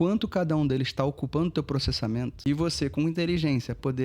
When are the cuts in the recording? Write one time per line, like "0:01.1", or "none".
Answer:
0:02.4